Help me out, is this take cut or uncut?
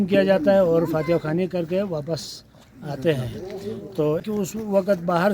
cut